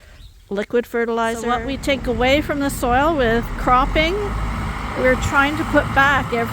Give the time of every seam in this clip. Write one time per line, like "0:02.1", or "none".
0:01.6